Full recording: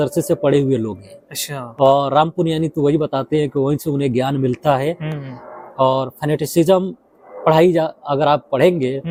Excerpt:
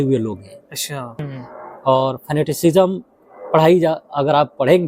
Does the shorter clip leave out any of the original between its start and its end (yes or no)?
yes